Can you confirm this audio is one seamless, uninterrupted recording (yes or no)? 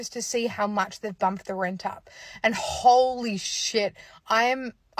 yes